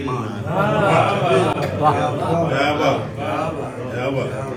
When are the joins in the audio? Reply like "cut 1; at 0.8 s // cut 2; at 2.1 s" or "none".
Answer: none

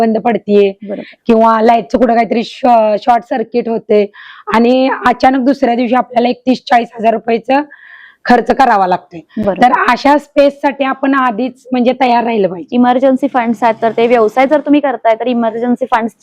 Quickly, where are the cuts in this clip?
none

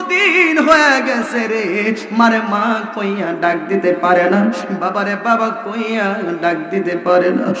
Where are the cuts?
none

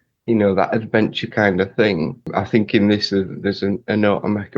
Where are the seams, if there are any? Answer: cut 1; at 2.3 s

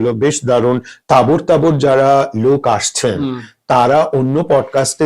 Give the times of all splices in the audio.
cut 1; at 0.9 s

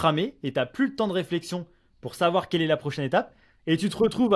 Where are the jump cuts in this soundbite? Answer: none

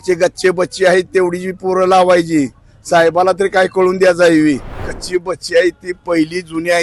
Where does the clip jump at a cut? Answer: cut 1; at 4.9 s

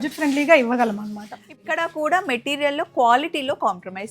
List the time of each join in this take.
cut 1; at 1.6 s

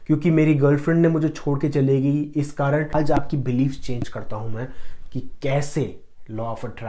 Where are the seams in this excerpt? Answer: cut 1; at 2.9 s

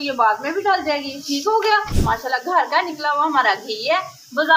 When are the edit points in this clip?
cut 1; at 1.9 s

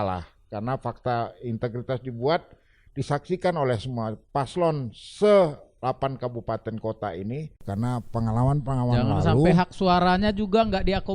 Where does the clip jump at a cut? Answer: cut 1; at 7.6 s

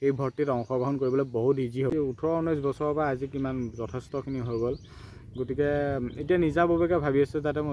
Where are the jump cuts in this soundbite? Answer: cut 1; at 1.9 s

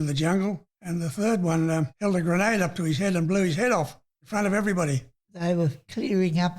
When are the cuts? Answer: cut 1; at 5.2 s

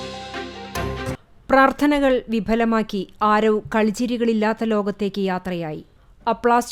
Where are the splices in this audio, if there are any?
none

